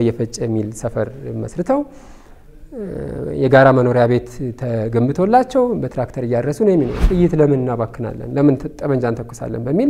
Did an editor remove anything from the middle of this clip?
yes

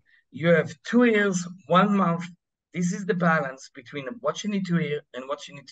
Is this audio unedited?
yes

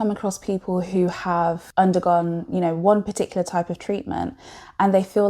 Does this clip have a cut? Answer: yes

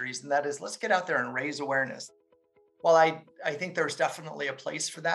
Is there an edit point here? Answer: yes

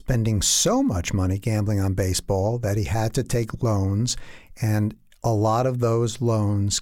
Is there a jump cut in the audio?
no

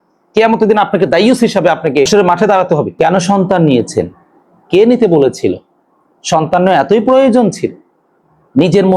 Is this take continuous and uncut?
no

